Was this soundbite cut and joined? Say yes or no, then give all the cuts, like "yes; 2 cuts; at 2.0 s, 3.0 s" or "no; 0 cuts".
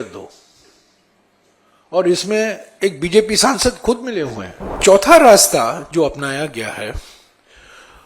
yes; 1 cut; at 4.8 s